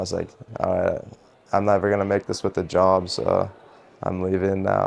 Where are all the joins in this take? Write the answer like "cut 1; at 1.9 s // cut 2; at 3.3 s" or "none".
none

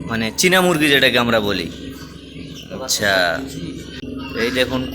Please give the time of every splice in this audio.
cut 1; at 3.9 s

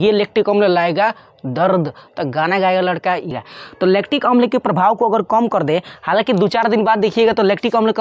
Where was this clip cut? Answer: cut 1; at 3.3 s

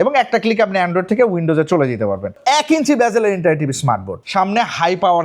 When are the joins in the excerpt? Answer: cut 1; at 2.4 s // cut 2; at 4.2 s

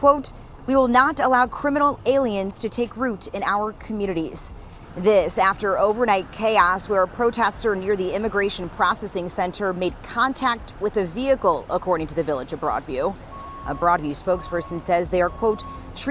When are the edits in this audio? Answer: none

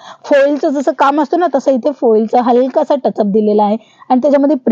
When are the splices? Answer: none

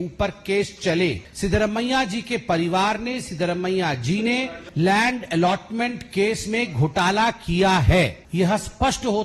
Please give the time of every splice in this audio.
cut 1; at 1.3 s // cut 2; at 4.6 s // cut 3; at 8.2 s

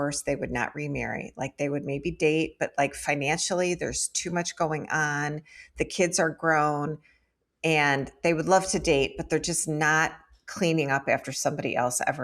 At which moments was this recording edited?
none

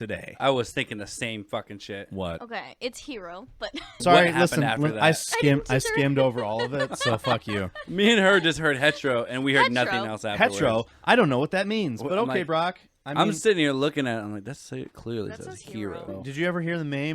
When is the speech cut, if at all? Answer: cut 1; at 4.0 s // cut 2; at 16.1 s

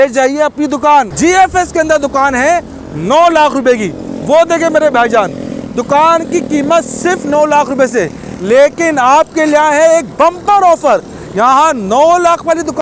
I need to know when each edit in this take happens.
none

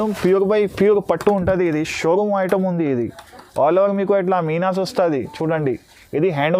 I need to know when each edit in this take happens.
none

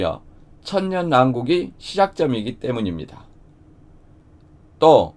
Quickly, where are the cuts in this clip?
cut 1; at 4.2 s

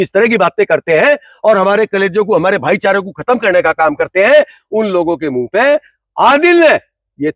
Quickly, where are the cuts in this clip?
none

